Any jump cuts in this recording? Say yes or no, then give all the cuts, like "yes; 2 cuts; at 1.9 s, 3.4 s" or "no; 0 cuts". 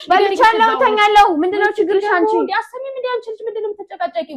no; 0 cuts